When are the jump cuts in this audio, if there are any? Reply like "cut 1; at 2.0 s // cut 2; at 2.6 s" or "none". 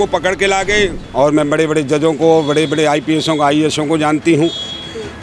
cut 1; at 1.0 s

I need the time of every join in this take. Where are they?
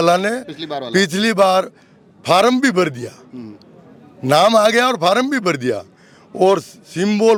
none

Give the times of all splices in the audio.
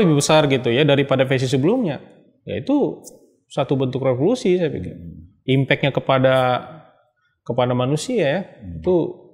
none

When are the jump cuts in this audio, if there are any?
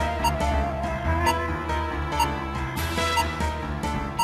none

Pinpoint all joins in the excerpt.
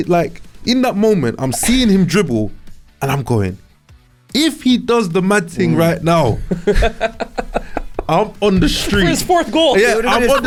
none

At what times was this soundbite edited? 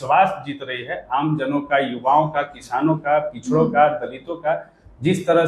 none

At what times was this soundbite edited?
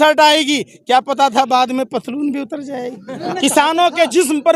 cut 1; at 3.2 s

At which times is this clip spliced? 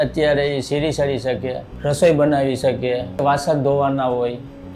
cut 1; at 1.7 s // cut 2; at 3.2 s

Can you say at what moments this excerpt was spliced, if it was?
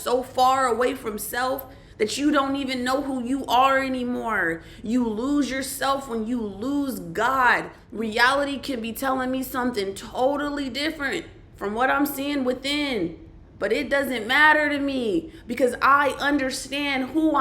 cut 1; at 7.8 s

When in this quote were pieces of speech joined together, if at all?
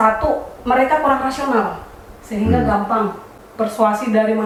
none

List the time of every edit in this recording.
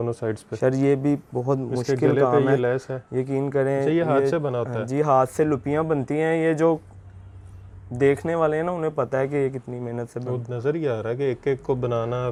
none

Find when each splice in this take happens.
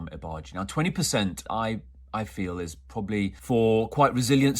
cut 1; at 1.4 s // cut 2; at 3.4 s

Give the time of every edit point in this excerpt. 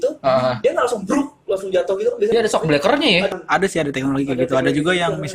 cut 1; at 2.3 s // cut 2; at 3.3 s

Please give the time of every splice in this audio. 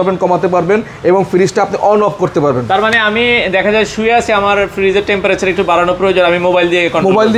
none

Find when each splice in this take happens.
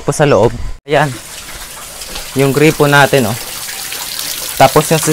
cut 1; at 0.9 s

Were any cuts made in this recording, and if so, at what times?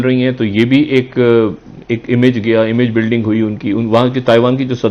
none

